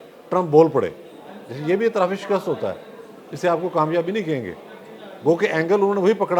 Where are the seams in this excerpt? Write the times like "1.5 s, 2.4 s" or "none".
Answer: none